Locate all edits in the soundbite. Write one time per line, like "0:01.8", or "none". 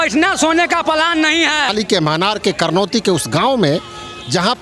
0:01.7